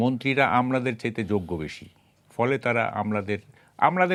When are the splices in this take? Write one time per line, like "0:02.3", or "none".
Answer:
none